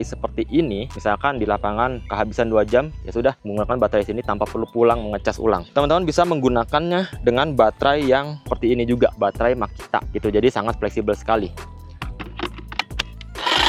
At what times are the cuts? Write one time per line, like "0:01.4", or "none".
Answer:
none